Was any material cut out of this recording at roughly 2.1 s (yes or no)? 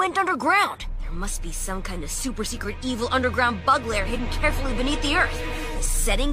no